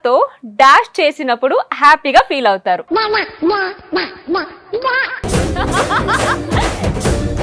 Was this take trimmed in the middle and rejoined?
no; 0 cuts

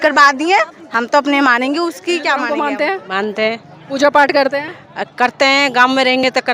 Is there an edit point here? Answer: yes; 1 cut; at 2.5 s

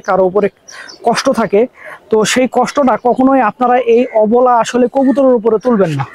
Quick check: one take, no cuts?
yes; 0 cuts

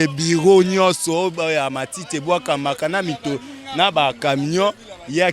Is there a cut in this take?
no; 0 cuts

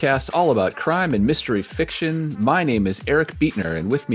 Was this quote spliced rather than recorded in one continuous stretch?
no; 0 cuts

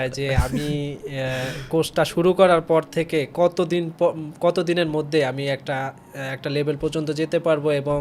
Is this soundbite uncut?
yes; 0 cuts

